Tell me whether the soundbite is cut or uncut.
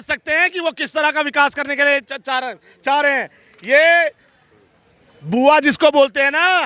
uncut